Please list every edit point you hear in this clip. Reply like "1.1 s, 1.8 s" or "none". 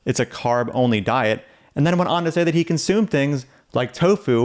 none